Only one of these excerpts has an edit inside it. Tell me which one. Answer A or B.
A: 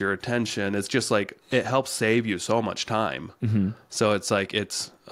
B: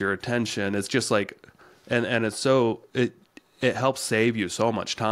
A